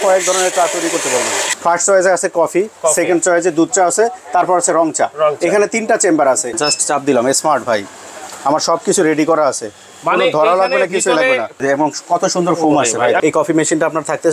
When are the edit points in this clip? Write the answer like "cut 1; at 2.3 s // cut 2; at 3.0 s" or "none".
cut 1; at 1.5 s // cut 2; at 6.6 s // cut 3; at 11.6 s // cut 4; at 13.2 s